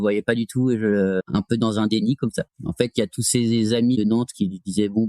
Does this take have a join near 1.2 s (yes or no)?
yes